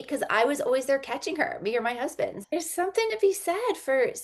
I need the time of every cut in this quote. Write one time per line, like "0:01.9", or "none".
0:02.4